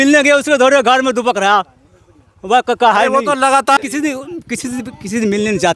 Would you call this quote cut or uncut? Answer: cut